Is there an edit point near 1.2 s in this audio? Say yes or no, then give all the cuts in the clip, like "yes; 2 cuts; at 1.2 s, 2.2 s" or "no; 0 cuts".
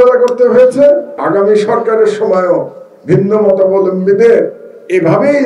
yes; 1 cut; at 1.2 s